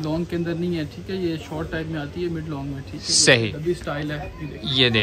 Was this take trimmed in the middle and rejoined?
yes; 1 cut; at 3.5 s

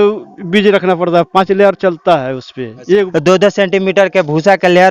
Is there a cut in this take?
yes; 1 cut; at 3.1 s

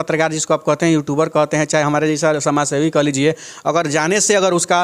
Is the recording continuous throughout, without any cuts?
yes; 0 cuts

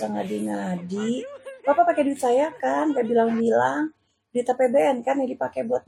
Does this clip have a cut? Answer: no; 0 cuts

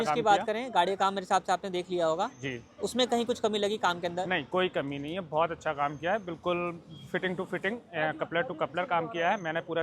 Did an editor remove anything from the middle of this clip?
no; 0 cuts

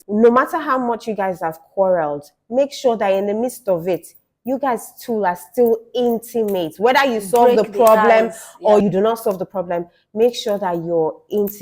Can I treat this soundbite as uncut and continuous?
no; 1 cut; at 8.8 s

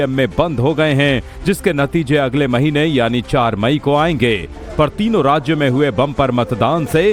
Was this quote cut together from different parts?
no; 0 cuts

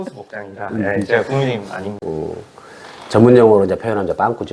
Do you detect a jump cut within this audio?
yes; 1 cut; at 1.9 s

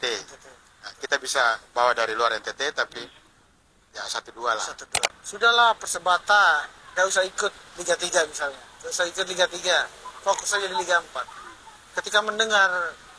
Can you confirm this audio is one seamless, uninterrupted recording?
no; 1 cut; at 5.2 s

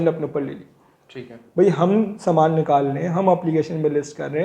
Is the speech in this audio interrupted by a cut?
no; 0 cuts

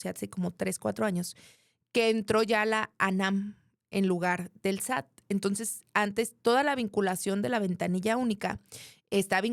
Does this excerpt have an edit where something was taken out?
no; 0 cuts

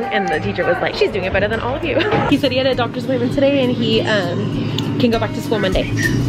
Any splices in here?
yes; 2 cuts; at 0.9 s, 2.3 s

